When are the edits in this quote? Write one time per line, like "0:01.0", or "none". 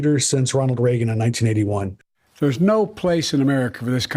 0:02.2